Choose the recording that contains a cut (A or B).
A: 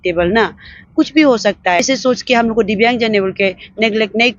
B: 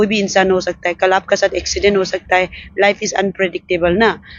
A